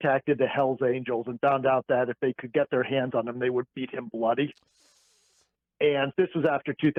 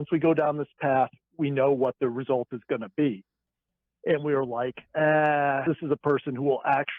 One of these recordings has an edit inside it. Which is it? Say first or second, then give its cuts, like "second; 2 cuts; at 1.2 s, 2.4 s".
second; 1 cut; at 5.6 s